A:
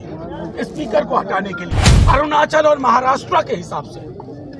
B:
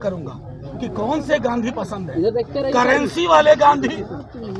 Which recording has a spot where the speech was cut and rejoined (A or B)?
A